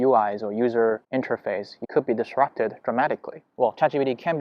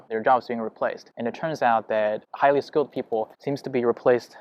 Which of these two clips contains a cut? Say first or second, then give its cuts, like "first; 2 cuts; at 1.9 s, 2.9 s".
first; 2 cuts; at 1.7 s, 3.5 s